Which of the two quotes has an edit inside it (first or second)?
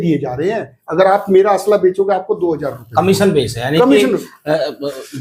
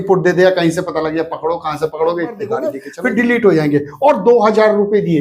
second